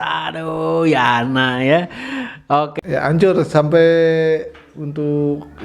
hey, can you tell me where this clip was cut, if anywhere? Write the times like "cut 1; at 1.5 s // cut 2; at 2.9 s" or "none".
cut 1; at 2.7 s